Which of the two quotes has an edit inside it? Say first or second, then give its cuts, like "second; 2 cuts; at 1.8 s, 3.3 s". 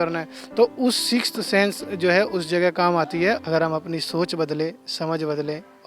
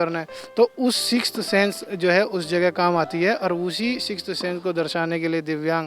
first; 1 cut; at 3.4 s